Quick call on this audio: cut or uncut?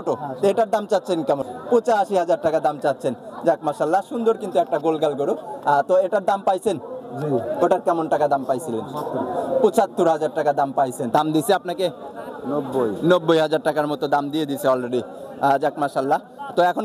cut